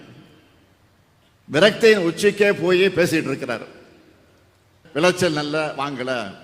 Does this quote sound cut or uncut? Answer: cut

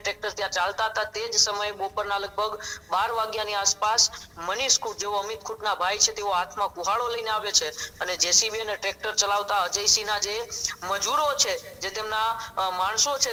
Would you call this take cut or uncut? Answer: uncut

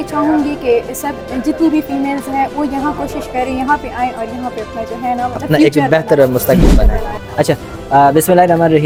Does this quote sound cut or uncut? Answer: uncut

